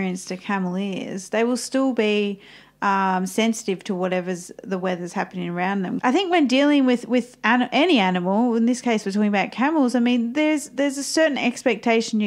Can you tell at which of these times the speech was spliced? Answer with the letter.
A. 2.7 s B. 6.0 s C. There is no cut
B